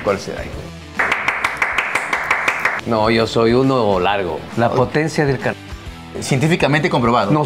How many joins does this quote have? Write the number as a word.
three